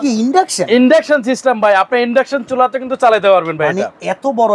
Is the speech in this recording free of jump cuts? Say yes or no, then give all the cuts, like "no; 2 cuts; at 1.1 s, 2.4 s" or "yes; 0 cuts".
yes; 0 cuts